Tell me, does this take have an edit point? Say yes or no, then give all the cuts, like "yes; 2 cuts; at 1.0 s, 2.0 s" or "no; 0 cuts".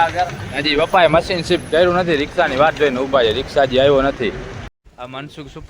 yes; 1 cut; at 4.7 s